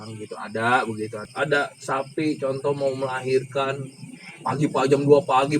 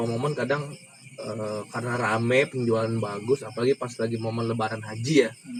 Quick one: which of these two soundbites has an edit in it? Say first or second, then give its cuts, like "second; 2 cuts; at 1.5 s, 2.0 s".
first; 1 cut; at 1.2 s